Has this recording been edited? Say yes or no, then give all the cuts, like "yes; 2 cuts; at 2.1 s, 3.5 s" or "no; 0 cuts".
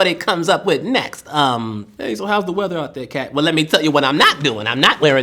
no; 0 cuts